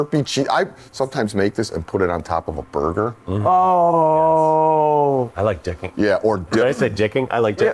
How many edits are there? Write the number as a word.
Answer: zero